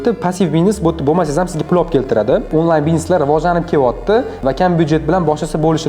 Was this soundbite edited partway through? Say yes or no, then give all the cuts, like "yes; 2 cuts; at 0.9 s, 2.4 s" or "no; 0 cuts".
yes; 1 cut; at 2.5 s